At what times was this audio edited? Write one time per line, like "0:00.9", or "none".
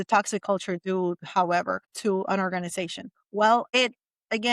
0:01.8
0:03.7